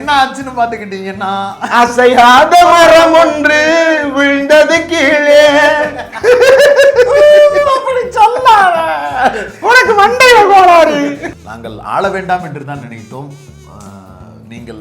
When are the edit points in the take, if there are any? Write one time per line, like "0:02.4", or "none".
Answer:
0:11.3

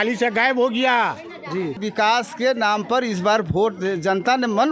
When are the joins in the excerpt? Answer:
0:01.8

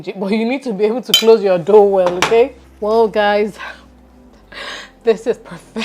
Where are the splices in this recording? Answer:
0:02.6

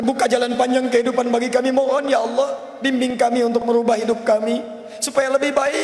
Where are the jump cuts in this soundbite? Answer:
none

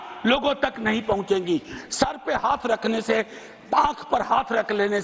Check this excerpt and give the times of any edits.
none

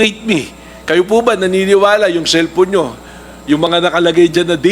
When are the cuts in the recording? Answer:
none

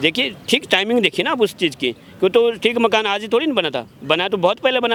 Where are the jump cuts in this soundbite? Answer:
none

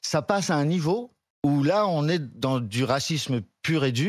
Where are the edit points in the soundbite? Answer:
0:01.2

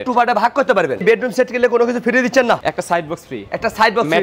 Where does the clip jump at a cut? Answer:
0:01.0
0:02.6

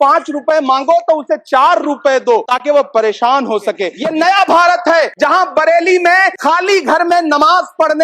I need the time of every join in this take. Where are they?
0:02.5
0:03.9
0:05.1
0:06.3

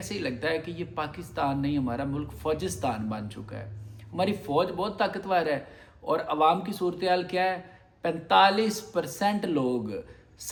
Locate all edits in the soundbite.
none

